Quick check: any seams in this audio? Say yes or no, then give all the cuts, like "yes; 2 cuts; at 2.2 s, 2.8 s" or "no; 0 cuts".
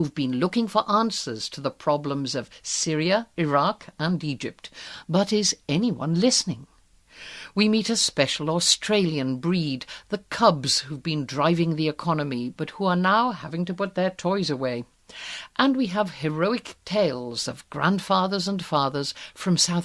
no; 0 cuts